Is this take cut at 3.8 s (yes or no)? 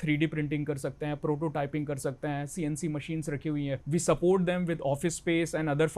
yes